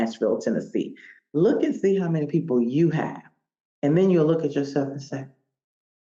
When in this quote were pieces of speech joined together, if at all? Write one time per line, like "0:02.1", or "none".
none

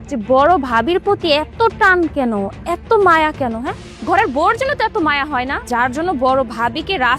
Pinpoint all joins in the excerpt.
0:05.6

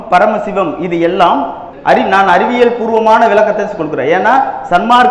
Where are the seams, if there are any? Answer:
0:01.7

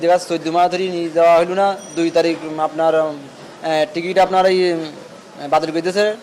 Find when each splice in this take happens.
none

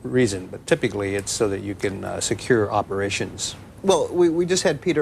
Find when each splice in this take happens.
none

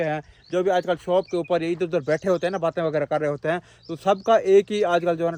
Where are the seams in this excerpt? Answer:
none

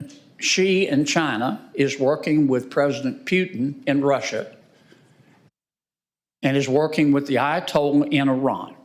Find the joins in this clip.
none

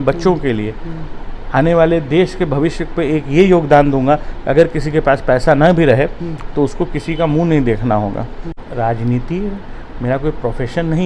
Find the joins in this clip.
0:08.6

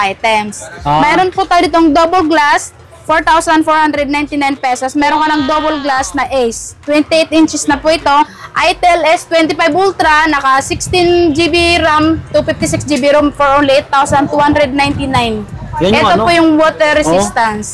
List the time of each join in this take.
0:08.4

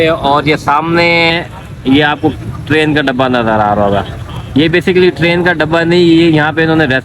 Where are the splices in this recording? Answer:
none

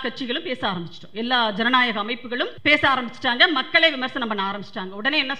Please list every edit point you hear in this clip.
0:02.5

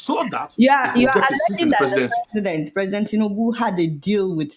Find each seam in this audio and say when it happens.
none

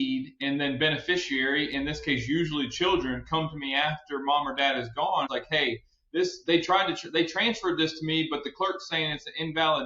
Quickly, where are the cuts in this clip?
0:05.3

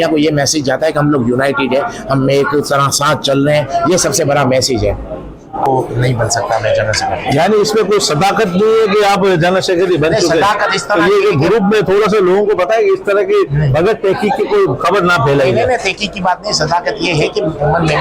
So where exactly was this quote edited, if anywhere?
0:05.6

